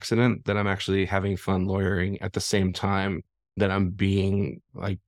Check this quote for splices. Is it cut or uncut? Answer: uncut